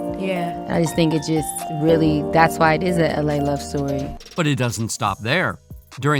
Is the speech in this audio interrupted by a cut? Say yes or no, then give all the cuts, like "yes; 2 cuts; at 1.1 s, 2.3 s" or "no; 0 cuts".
no; 0 cuts